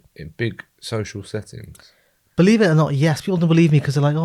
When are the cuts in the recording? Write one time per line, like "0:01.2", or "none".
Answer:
none